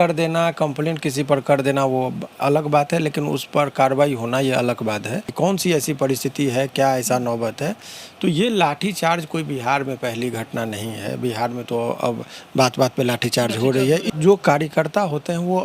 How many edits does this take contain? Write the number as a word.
two